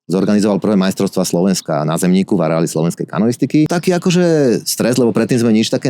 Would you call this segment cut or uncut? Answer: cut